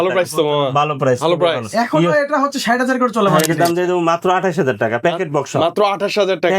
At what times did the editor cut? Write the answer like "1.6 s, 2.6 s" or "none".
3.3 s